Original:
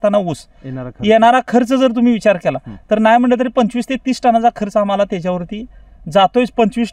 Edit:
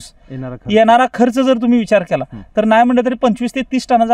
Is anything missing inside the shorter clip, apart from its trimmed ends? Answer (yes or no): no